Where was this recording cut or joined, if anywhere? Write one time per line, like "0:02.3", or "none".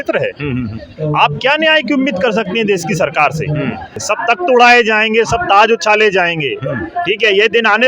0:04.0